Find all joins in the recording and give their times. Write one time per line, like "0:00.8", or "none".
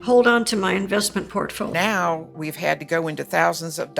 0:01.7